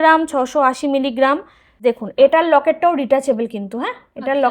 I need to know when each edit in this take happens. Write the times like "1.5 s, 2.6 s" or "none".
1.7 s